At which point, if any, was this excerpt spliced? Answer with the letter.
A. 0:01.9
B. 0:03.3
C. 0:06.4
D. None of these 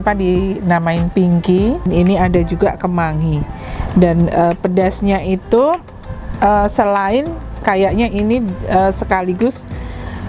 A